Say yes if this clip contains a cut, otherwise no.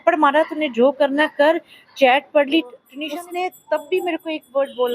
yes